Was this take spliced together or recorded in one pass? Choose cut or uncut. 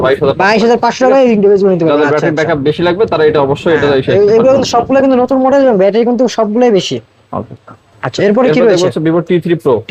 uncut